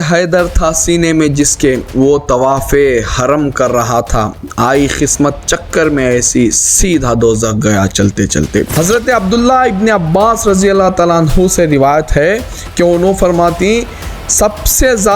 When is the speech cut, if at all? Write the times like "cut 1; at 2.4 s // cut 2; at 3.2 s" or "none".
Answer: cut 1; at 8.7 s